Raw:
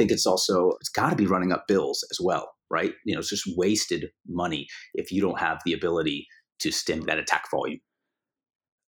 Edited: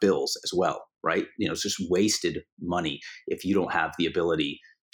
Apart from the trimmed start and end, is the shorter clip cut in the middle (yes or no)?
no